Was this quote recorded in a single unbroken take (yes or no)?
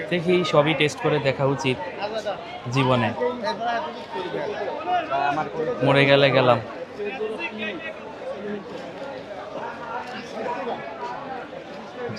yes